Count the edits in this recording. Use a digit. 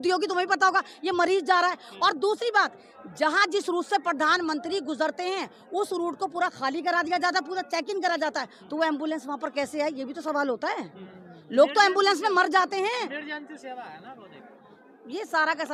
0